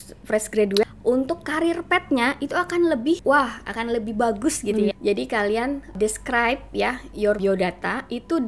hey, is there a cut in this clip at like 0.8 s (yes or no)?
yes